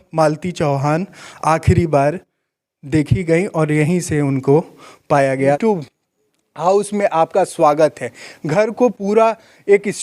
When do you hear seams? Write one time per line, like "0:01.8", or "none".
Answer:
0:05.6